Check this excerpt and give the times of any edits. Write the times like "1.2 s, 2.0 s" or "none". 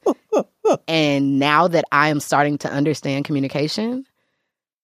none